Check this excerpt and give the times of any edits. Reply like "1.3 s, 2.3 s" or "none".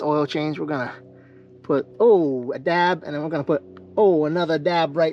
none